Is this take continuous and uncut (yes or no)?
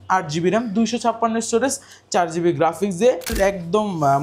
no